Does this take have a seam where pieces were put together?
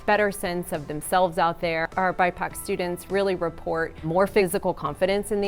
yes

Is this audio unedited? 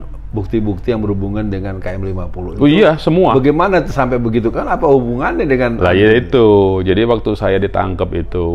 yes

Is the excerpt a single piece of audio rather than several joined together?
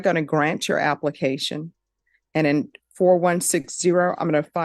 yes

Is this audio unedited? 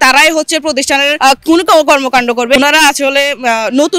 no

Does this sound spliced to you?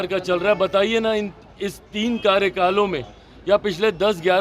no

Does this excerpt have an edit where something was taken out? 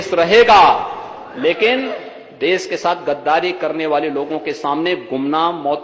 no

